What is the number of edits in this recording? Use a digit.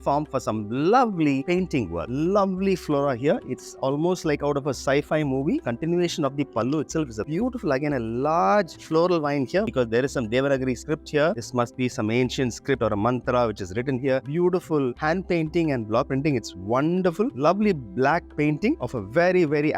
5